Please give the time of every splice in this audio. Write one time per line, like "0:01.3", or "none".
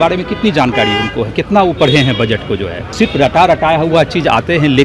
0:02.8